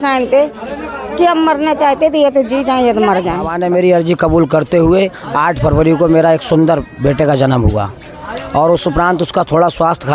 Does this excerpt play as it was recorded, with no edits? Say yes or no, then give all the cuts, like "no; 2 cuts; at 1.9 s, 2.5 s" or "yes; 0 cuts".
no; 1 cut; at 3.5 s